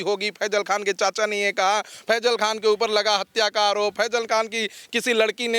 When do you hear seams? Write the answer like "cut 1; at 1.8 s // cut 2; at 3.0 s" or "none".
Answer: none